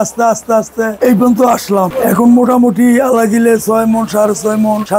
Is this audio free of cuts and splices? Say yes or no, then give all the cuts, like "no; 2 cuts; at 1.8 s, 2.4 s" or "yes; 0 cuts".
no; 2 cuts; at 1.0 s, 1.9 s